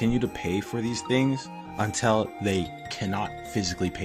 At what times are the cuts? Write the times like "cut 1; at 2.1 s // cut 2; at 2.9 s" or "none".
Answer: none